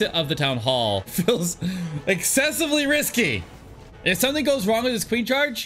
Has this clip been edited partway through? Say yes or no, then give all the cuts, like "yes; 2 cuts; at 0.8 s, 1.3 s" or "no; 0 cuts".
yes; 2 cuts; at 1.1 s, 3.9 s